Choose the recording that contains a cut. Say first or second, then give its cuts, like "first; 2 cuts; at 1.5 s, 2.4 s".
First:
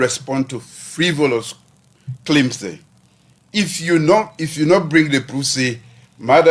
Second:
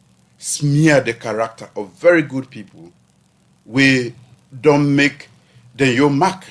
second; 1 cut; at 4.9 s